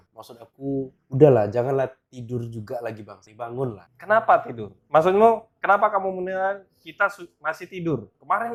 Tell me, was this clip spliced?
no; 0 cuts

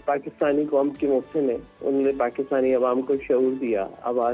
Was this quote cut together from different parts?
no; 0 cuts

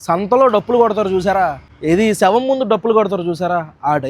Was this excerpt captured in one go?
no; 1 cut; at 1.7 s

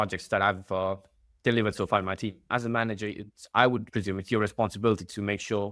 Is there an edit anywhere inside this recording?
yes; 2 cuts; at 2.4 s, 3.9 s

